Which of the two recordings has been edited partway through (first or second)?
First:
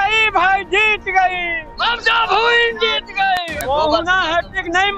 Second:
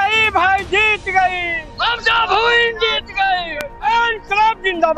first